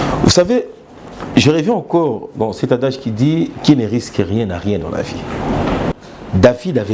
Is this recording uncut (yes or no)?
no